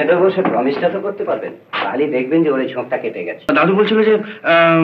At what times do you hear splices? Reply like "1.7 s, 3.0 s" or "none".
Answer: 3.5 s